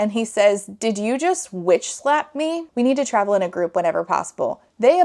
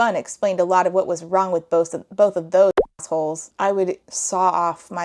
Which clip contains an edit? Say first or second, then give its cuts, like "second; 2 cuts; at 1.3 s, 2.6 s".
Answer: first; 1 cut; at 2.6 s